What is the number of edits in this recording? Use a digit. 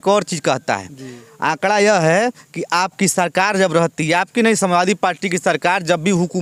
0